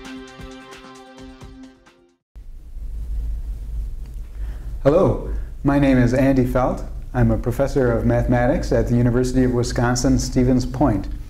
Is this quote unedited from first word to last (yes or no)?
yes